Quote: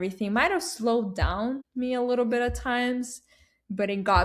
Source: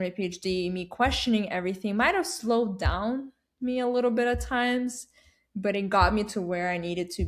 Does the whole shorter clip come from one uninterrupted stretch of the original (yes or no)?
no